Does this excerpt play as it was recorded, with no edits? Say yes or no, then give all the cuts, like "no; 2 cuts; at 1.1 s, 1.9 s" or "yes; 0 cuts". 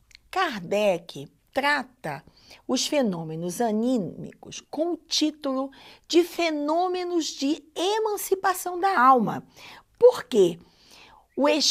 yes; 0 cuts